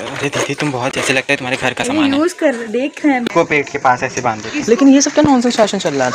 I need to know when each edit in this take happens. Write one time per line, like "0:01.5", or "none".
0:03.3